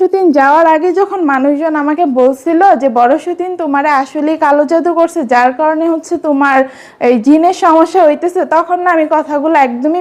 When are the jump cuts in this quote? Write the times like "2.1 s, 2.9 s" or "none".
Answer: none